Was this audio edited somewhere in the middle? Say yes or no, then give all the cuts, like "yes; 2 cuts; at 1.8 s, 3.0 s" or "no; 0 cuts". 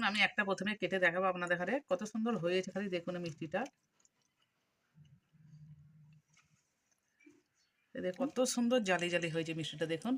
yes; 1 cut; at 8.3 s